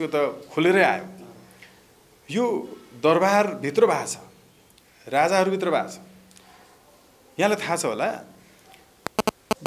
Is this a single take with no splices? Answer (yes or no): yes